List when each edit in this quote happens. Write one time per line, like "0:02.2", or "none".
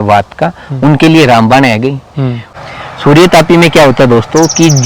0:02.4